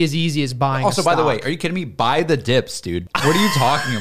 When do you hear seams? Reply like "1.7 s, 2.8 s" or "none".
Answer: 3.0 s